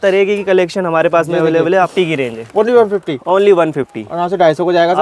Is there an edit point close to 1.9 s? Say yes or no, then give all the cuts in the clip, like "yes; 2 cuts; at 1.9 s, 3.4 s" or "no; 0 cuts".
yes; 1 cut; at 1.9 s